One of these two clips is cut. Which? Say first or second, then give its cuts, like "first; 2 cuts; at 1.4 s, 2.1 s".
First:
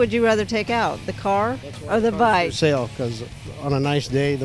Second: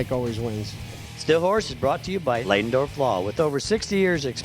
second; 1 cut; at 1.2 s